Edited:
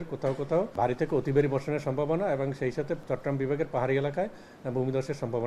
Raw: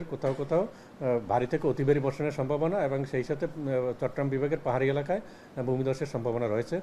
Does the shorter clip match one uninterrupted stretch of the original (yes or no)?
no